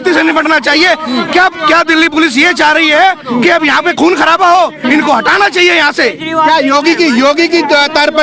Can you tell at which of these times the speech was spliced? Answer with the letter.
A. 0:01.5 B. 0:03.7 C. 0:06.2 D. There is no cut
D